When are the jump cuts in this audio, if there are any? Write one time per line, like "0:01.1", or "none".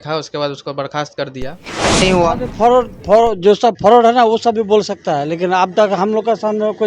0:02.0